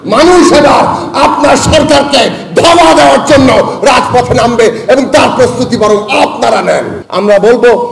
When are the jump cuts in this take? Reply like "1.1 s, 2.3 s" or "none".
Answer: 7.0 s